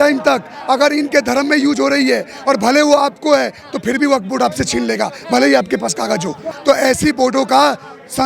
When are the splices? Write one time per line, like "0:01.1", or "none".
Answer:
0:06.5